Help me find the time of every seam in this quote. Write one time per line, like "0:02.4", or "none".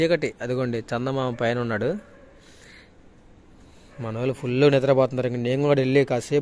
none